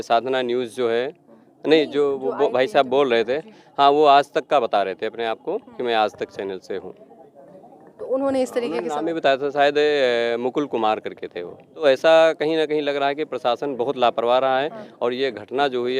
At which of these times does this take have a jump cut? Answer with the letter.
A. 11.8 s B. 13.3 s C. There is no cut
A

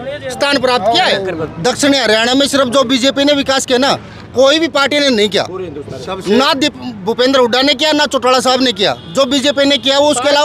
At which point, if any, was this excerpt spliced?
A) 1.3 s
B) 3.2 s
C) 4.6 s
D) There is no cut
A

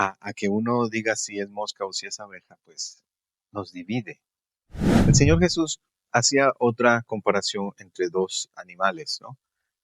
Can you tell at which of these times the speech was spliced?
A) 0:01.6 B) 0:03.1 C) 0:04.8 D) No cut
C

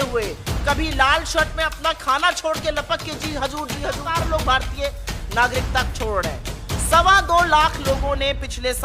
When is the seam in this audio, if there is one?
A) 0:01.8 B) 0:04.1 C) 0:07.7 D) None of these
B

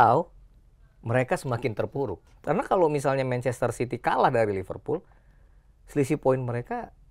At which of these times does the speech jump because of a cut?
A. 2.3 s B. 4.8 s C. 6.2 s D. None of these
A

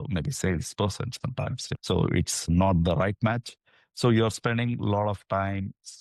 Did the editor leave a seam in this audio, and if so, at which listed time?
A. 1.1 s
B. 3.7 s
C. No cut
C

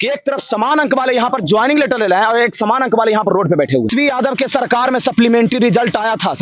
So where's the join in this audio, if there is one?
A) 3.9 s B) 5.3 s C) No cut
A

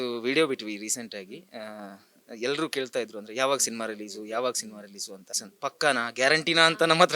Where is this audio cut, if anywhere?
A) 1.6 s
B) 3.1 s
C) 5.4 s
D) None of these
C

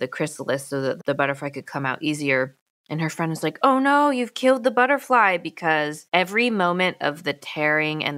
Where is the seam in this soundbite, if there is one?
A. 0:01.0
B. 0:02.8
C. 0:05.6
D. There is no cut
A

